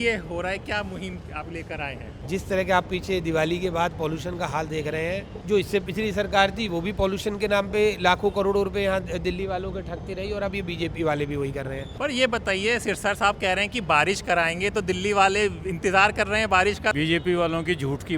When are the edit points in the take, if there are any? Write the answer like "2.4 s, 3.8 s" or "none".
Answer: 2.1 s, 5.3 s, 11.8 s, 16.9 s